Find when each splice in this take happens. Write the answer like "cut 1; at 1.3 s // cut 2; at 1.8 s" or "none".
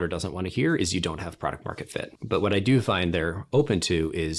cut 1; at 2.1 s